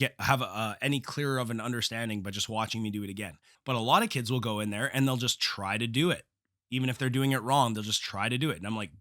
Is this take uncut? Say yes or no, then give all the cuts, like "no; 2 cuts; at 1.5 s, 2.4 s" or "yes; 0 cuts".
no; 1 cut; at 3.5 s